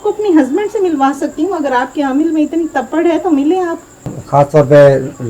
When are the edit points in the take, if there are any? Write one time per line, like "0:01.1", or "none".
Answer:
0:04.1